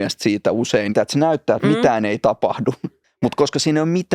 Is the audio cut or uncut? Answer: cut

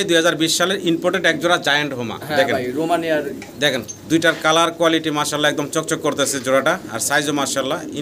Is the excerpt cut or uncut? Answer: uncut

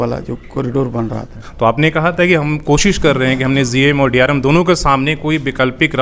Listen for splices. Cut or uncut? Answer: cut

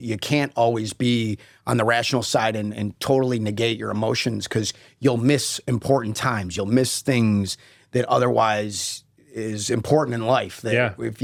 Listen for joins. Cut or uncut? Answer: uncut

